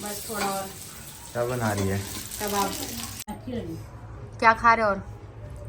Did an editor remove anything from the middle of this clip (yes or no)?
yes